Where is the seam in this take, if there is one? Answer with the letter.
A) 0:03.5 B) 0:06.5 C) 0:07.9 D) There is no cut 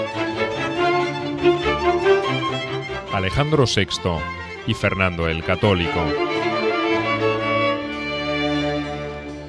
D